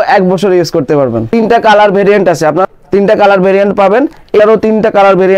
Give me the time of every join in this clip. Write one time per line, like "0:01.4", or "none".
0:01.2
0:02.7
0:04.4

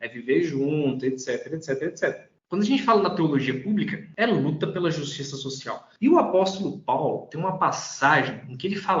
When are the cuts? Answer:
none

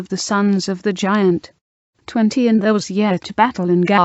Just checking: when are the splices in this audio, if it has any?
none

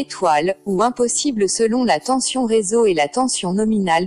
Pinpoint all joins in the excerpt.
none

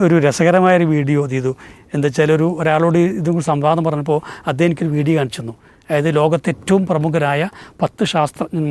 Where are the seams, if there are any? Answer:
none

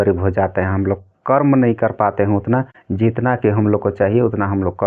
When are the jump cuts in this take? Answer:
none

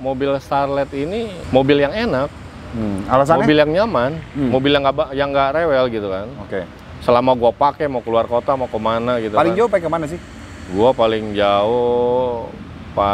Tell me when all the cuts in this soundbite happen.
0:01.4

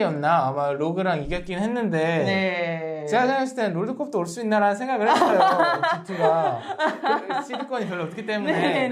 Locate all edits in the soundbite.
none

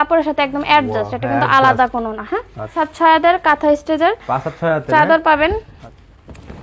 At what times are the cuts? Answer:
0:02.8
0:05.7

